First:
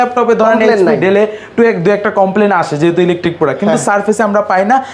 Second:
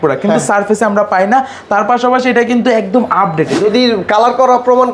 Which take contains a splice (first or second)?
second